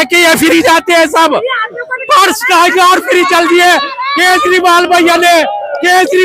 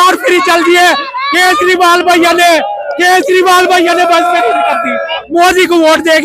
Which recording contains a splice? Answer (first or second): second